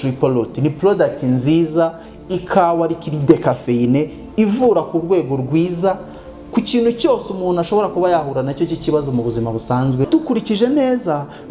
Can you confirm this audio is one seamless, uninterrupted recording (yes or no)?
no